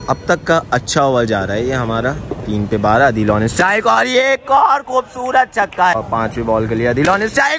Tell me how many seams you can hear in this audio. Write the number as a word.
one